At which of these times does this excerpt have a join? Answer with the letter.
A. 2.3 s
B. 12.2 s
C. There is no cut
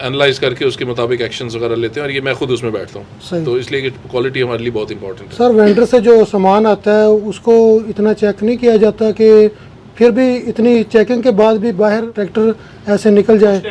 B